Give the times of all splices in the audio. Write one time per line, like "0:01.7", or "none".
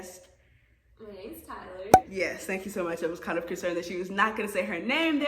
none